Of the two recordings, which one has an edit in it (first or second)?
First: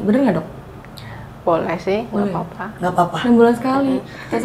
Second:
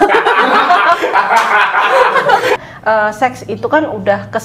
second